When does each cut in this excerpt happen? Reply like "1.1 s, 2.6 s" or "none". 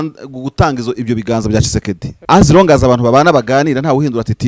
2.1 s